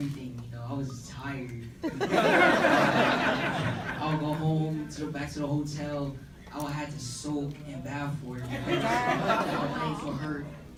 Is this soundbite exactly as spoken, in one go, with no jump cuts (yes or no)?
yes